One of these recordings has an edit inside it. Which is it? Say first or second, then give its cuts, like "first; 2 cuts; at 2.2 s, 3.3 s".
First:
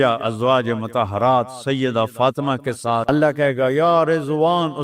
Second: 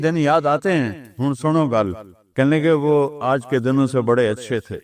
first; 1 cut; at 3.0 s